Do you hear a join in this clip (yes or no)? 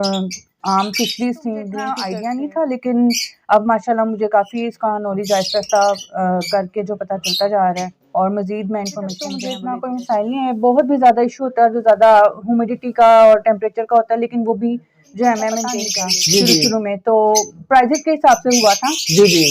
yes